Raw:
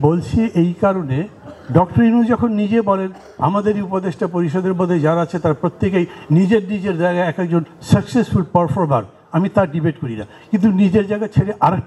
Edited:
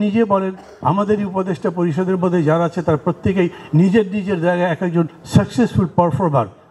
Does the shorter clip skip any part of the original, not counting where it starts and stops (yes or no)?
no